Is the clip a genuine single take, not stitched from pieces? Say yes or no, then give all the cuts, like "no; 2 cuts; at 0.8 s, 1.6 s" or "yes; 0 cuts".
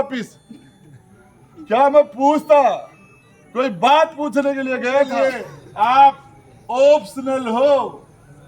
no; 1 cut; at 5.1 s